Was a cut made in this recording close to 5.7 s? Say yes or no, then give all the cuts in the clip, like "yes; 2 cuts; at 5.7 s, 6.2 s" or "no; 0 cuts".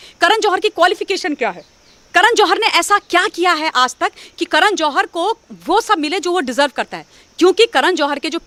no; 0 cuts